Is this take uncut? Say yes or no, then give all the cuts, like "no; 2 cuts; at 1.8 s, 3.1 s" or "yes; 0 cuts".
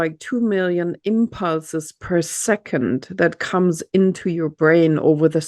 yes; 0 cuts